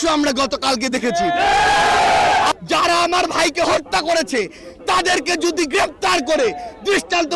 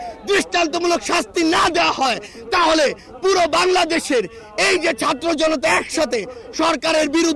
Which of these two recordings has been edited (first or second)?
first